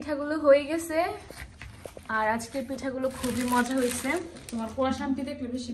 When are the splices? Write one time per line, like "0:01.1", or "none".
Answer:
none